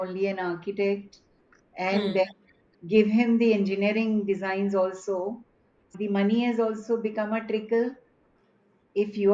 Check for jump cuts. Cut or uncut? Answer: cut